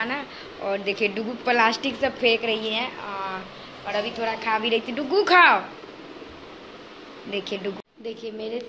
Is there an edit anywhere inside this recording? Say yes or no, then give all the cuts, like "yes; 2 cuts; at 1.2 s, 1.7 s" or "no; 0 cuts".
yes; 1 cut; at 7.8 s